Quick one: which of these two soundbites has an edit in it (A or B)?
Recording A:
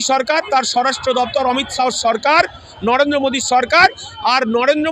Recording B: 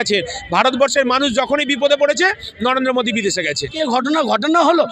B